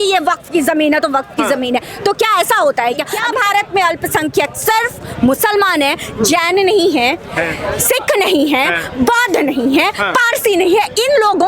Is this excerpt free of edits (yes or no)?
no